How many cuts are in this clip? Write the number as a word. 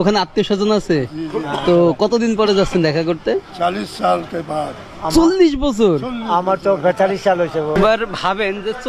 one